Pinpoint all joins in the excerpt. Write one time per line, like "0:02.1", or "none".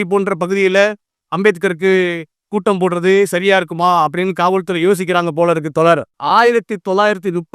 0:06.1